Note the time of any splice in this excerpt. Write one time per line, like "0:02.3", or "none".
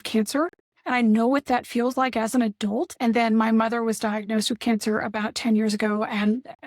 0:02.9